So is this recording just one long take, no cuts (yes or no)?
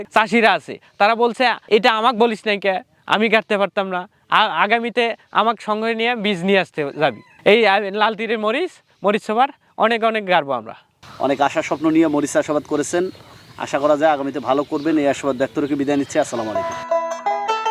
yes